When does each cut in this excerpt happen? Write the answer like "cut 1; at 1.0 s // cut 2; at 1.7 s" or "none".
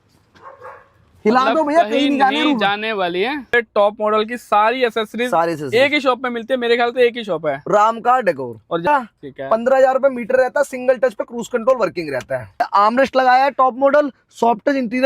cut 1; at 3.5 s // cut 2; at 8.9 s // cut 3; at 12.7 s